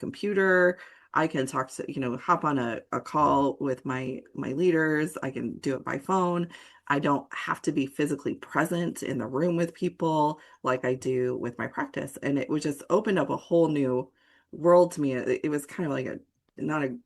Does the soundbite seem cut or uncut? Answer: uncut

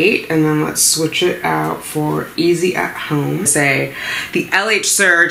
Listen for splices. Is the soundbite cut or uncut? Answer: cut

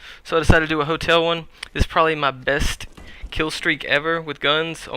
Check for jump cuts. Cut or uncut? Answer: cut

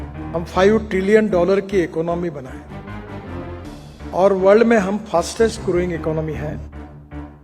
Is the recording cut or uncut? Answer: cut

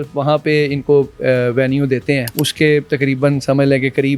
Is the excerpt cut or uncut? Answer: cut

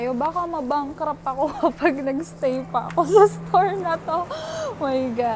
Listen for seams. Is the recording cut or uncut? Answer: uncut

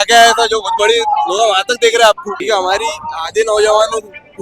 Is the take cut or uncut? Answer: cut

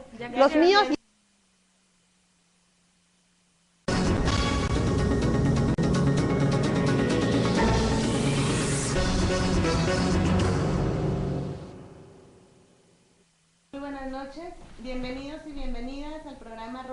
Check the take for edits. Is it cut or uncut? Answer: uncut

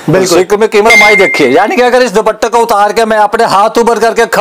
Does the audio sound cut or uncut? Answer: cut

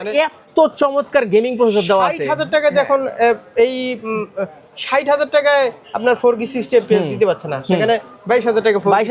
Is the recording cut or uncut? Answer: uncut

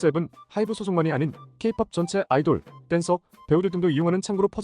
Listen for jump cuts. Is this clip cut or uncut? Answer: uncut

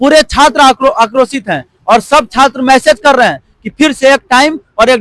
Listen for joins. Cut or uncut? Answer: uncut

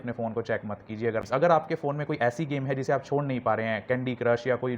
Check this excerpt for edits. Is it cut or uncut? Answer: cut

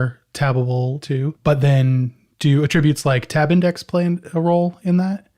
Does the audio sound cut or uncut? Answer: cut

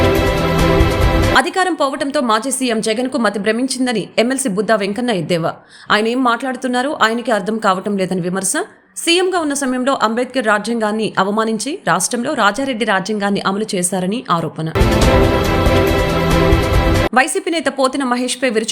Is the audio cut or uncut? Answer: cut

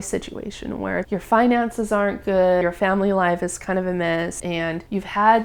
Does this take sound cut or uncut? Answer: cut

